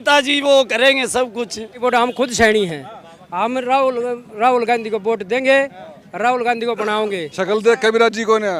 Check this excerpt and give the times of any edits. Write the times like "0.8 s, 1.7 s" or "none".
1.8 s, 7.3 s